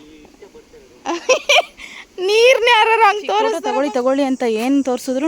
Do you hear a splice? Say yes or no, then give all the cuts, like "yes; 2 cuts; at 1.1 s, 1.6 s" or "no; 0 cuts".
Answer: yes; 1 cut; at 3.6 s